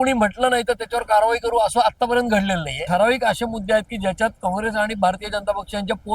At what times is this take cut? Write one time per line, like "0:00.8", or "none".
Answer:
0:02.7